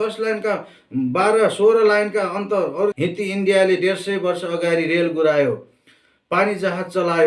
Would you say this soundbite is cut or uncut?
cut